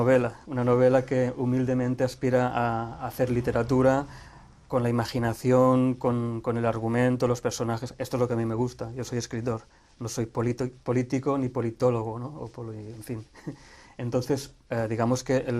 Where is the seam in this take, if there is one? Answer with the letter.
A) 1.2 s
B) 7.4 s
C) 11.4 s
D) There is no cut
B